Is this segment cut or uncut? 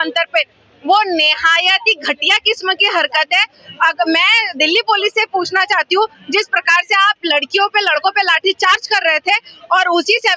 uncut